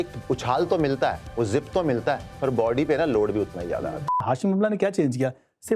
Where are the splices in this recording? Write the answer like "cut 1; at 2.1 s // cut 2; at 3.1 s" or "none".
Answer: cut 1; at 4.1 s

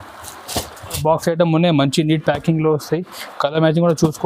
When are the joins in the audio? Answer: cut 1; at 1.0 s

